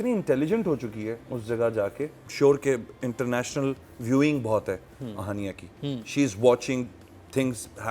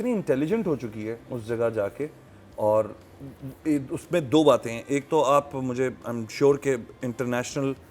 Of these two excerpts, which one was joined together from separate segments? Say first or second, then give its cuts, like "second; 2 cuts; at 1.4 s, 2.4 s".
first; 1 cut; at 2.2 s